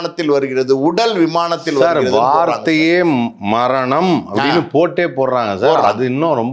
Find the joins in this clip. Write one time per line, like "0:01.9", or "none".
none